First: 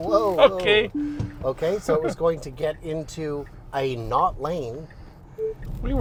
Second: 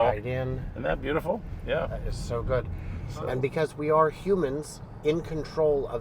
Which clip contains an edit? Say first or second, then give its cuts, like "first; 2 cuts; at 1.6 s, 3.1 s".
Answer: second; 1 cut; at 3.0 s